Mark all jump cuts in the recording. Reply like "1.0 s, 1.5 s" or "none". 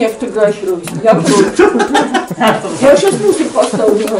none